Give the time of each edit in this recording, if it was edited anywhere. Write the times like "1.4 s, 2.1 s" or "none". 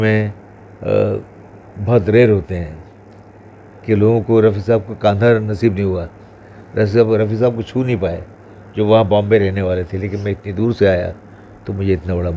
none